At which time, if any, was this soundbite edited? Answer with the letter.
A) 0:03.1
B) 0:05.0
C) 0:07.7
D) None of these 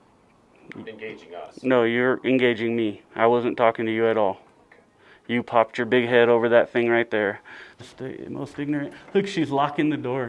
C